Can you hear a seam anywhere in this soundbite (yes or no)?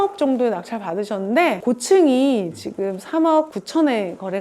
yes